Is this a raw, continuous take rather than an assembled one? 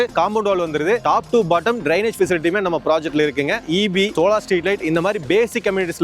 no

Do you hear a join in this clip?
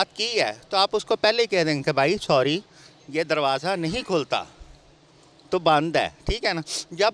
no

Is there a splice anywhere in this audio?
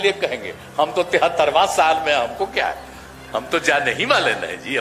no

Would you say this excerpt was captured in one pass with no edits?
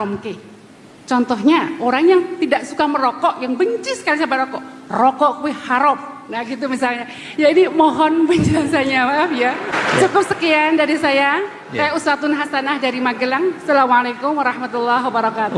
yes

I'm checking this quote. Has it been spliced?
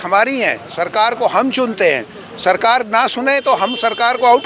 no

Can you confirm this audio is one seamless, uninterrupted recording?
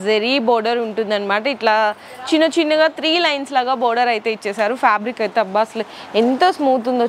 yes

